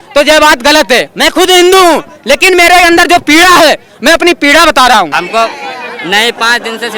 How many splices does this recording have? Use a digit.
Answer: 1